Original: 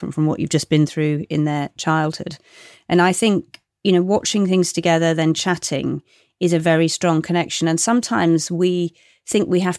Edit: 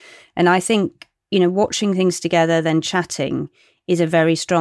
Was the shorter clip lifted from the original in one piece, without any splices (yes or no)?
yes